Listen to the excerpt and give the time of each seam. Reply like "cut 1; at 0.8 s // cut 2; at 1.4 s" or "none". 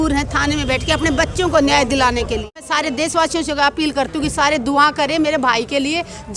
cut 1; at 2.7 s